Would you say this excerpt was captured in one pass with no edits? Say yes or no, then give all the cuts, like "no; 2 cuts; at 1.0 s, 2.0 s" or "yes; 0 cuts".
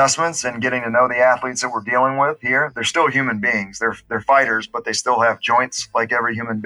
yes; 0 cuts